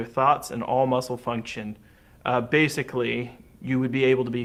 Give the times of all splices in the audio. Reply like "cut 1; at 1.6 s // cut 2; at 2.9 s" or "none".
none